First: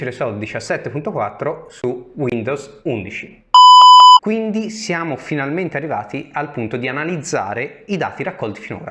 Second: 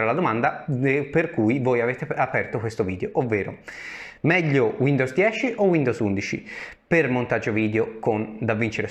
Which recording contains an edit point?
first; 1 cut; at 4.2 s

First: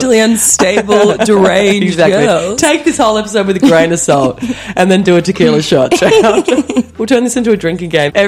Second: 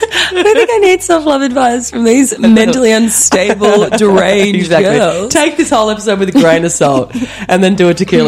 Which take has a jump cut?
first; 1 cut; at 6.9 s

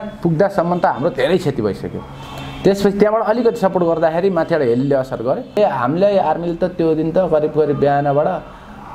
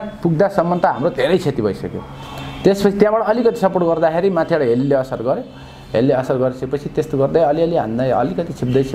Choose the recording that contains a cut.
first; 1 cut; at 5.6 s

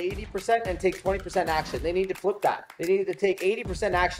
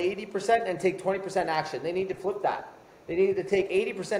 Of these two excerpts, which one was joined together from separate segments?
first; 1 cut; at 2.7 s

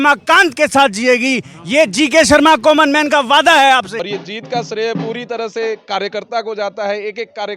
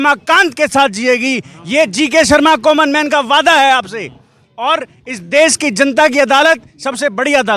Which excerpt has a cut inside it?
first; 1 cut; at 4.0 s

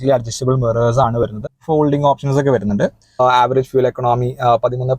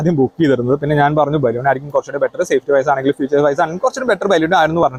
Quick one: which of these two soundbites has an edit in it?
first; 1 cut; at 3.0 s

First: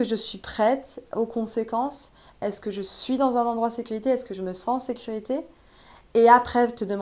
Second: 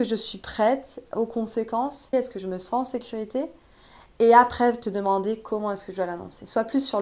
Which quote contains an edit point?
second; 1 cut; at 2.1 s

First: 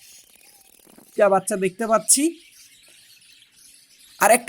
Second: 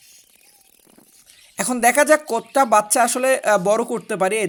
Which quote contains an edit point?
first; 1 cut; at 1.1 s

